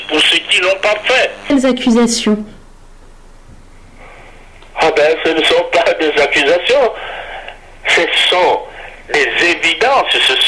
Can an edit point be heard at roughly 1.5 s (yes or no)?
yes